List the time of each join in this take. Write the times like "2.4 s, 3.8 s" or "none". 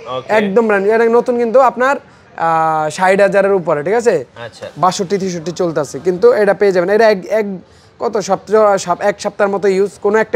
none